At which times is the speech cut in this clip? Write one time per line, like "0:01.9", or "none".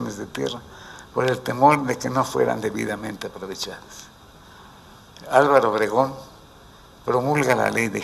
0:04.8